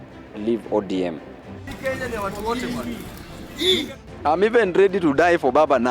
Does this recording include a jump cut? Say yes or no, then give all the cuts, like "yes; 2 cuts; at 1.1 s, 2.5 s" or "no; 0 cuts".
yes; 2 cuts; at 1.6 s, 4.0 s